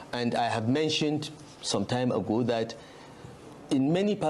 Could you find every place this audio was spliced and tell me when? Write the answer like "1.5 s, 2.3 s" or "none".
none